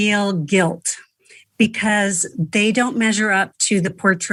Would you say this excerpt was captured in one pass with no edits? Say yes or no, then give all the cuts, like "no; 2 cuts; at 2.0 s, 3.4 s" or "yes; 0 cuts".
yes; 0 cuts